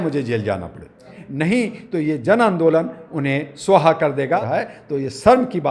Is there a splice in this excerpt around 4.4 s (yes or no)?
yes